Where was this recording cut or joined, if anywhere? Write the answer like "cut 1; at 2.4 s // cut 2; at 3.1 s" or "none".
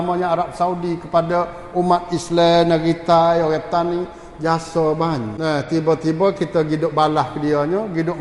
cut 1; at 5.3 s